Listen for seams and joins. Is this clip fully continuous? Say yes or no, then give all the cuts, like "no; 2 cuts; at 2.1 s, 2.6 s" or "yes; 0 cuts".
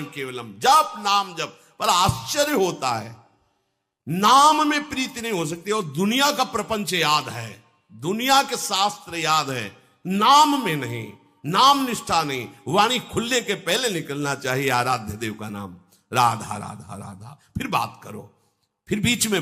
yes; 0 cuts